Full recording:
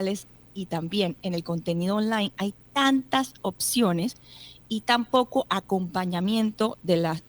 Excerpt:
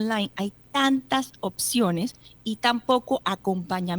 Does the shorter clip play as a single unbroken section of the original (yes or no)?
no